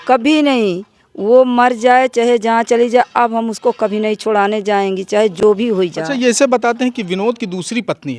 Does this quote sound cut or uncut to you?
uncut